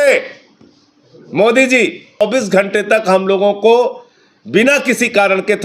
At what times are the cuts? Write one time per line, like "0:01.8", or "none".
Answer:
0:02.2